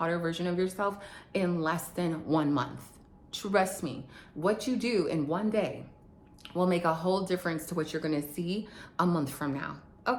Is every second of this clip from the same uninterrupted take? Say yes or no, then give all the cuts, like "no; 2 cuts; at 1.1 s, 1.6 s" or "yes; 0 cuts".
yes; 0 cuts